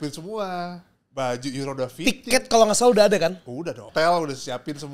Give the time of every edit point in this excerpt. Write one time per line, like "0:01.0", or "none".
0:03.8